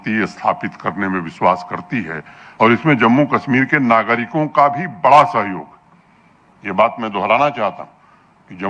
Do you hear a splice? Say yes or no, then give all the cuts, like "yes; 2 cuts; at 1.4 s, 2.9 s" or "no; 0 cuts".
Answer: yes; 1 cut; at 2.4 s